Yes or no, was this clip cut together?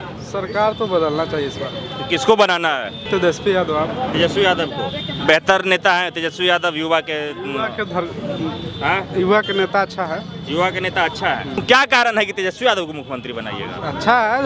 yes